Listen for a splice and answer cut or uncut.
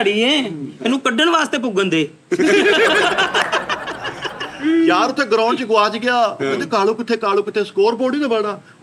uncut